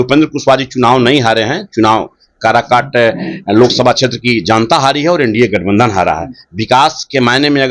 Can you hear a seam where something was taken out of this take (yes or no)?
no